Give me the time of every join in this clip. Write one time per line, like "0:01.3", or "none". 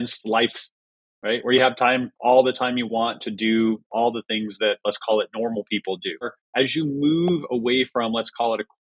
0:06.4